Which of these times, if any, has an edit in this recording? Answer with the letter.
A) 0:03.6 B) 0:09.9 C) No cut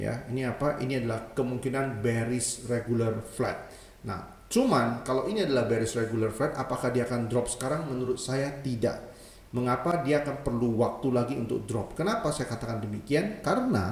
C